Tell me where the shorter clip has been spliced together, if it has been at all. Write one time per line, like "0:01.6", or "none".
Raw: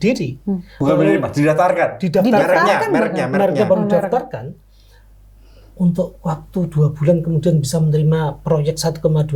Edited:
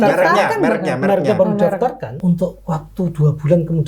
0:02.1